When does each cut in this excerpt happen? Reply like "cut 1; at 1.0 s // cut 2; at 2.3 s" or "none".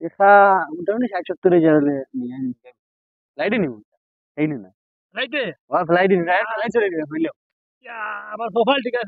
cut 1; at 3.5 s